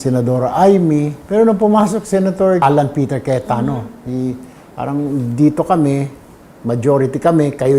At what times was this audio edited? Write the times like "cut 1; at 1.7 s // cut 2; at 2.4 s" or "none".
cut 1; at 1.2 s // cut 2; at 2.6 s